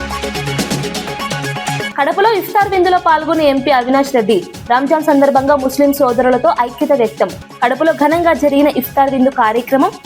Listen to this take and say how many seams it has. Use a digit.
1